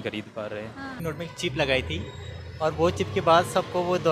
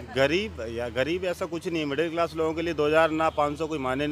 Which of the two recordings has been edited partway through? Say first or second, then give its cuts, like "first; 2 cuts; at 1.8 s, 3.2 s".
first; 1 cut; at 1.0 s